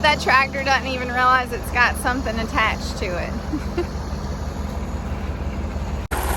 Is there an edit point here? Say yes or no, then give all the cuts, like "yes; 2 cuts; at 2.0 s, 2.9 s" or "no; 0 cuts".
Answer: no; 0 cuts